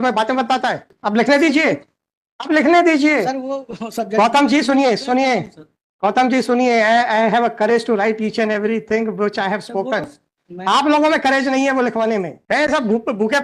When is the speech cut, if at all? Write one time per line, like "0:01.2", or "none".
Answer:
0:00.9
0:12.4